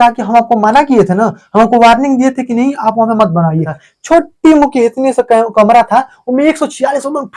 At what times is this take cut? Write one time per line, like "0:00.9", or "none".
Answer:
0:03.8